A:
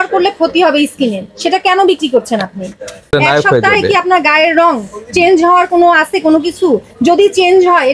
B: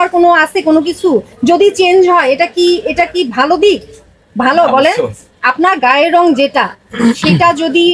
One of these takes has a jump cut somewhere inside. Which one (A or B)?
A